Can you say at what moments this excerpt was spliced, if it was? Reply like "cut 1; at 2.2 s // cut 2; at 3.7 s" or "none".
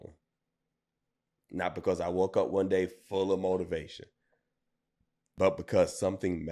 cut 1; at 5.3 s